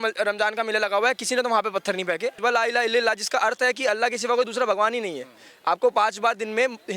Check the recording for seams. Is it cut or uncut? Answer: cut